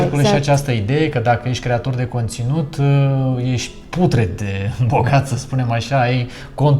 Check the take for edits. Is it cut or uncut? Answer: uncut